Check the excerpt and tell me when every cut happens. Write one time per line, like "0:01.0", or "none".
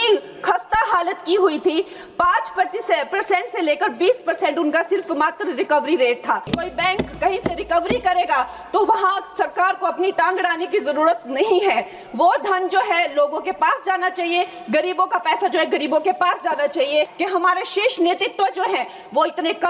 0:06.5
0:17.1